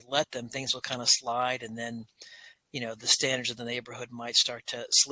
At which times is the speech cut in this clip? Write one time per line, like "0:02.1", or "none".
none

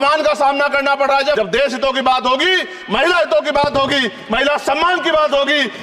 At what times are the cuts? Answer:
0:01.3

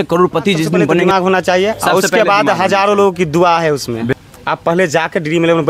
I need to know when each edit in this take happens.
0:01.1
0:04.1

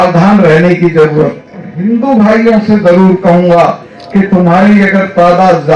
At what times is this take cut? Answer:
0:01.7

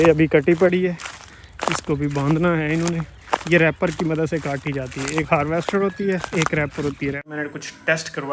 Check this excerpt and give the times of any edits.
0:07.3

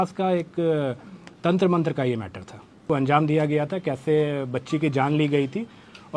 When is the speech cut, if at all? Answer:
0:02.8

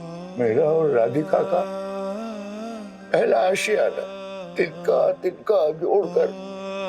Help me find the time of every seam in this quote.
0:04.5

